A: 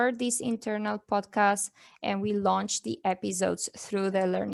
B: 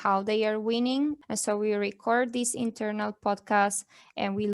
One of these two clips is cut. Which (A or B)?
B